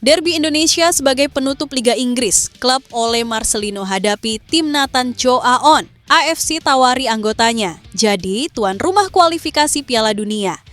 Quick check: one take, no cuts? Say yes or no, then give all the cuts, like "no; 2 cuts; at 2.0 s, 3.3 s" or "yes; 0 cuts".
no; 1 cut; at 5.9 s